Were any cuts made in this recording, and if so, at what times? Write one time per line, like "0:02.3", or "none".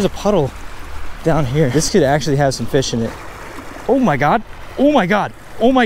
0:03.1